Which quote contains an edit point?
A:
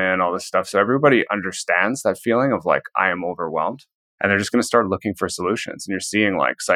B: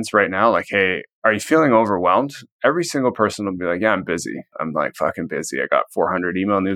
B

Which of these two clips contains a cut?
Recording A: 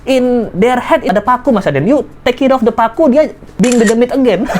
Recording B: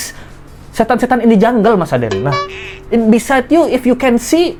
A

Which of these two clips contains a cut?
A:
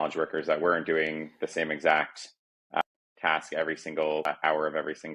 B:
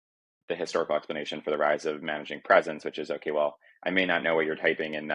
A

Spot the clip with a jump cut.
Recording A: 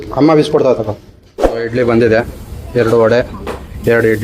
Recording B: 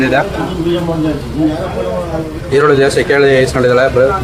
A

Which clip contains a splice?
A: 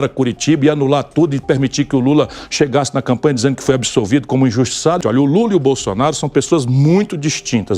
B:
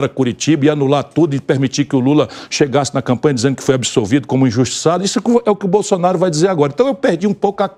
A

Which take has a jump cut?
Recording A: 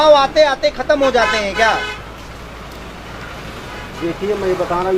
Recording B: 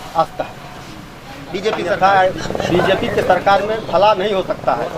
B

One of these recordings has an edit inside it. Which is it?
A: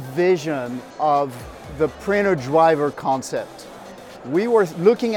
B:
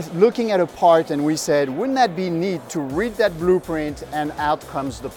B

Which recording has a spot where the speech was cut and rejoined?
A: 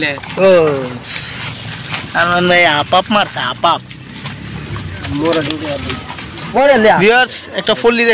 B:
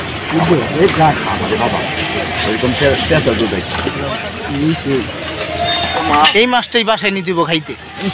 A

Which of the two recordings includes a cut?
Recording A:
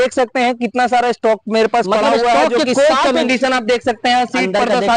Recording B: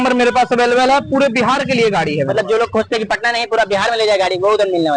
A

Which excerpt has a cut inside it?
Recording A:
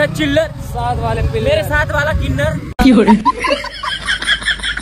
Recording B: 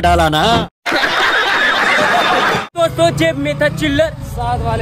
B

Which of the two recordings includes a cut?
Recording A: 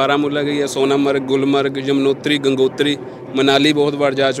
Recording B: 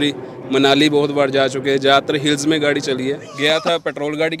B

